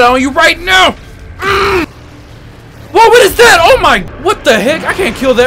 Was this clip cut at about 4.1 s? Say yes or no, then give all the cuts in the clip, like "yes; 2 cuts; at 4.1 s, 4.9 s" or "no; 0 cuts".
yes; 2 cuts; at 1.8 s, 4.1 s